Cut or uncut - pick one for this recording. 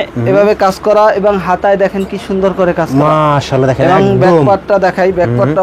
uncut